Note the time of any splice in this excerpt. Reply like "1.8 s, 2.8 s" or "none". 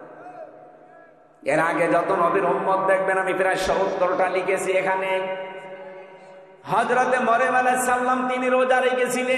none